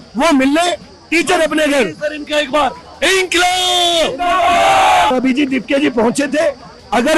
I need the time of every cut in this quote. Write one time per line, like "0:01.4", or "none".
0:05.1